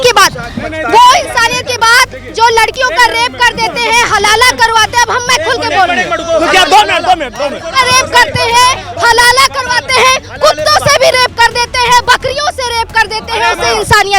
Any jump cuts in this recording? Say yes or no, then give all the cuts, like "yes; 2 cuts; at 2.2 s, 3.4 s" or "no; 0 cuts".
no; 0 cuts